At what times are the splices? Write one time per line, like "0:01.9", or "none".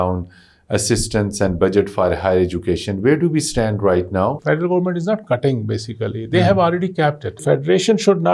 0:04.4
0:07.4